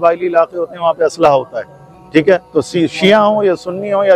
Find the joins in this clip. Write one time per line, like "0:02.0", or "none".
none

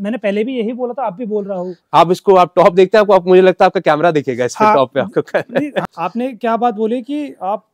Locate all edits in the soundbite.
0:05.8

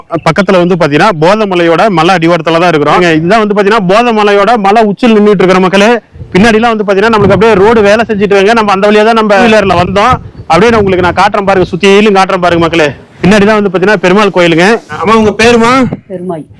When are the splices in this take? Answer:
0:03.0
0:09.4
0:13.1
0:15.0

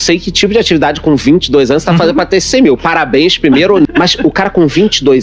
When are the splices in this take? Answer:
0:03.9

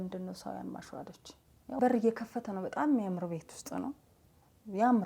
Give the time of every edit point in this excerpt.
0:01.8

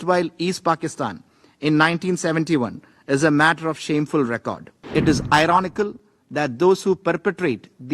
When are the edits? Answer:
0:04.7

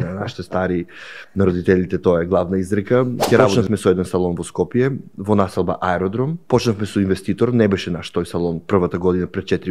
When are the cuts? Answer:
0:03.5
0:06.3

